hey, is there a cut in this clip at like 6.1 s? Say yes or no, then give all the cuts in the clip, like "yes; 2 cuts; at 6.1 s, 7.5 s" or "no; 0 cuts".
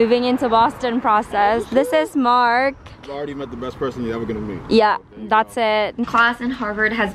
yes; 2 cuts; at 3.1 s, 6.1 s